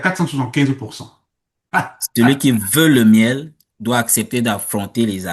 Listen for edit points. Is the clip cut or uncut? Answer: cut